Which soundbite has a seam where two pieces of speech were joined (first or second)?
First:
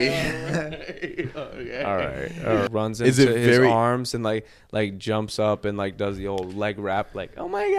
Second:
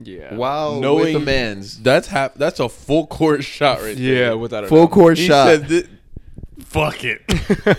first